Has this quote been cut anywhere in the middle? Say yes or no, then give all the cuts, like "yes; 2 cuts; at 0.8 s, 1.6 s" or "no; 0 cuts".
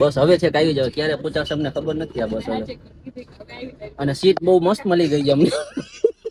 no; 0 cuts